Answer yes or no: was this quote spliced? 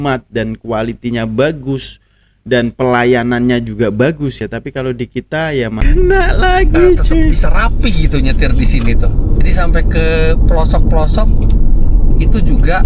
yes